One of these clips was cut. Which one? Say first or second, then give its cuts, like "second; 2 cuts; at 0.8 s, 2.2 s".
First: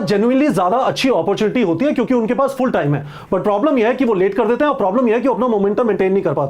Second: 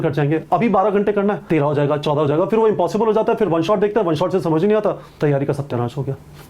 second; 2 cuts; at 1.4 s, 5.1 s